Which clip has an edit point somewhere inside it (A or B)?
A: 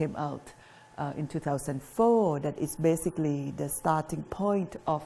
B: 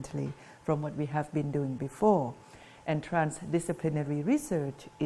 A